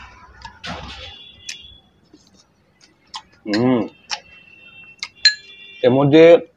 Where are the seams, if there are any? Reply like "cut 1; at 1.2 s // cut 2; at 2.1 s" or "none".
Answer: none